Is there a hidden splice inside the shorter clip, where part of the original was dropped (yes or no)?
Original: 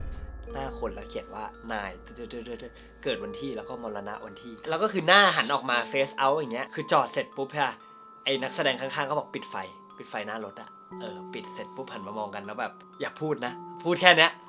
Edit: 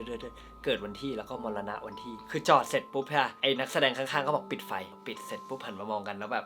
yes